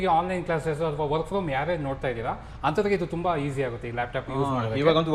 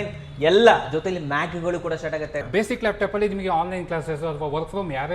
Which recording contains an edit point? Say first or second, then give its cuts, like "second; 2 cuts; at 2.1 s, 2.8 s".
second; 1 cut; at 2.4 s